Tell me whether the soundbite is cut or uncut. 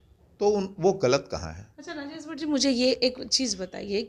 uncut